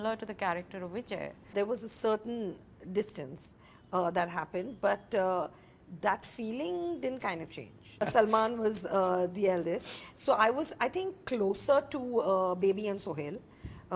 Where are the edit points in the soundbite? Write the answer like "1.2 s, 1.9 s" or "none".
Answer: 1.5 s, 8.0 s